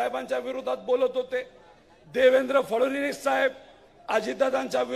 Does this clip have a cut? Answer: no; 0 cuts

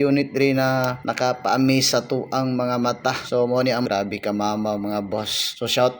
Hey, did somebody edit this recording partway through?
yes; 1 cut; at 3.9 s

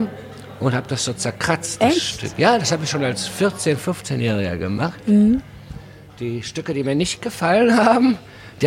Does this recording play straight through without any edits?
yes; 0 cuts

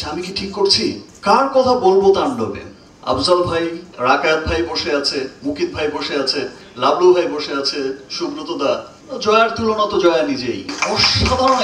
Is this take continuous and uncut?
no; 3 cuts; at 1.1 s, 3.9 s, 9.0 s

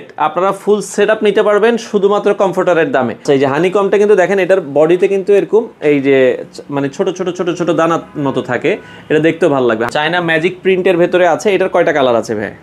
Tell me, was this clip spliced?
yes; 2 cuts; at 3.2 s, 9.9 s

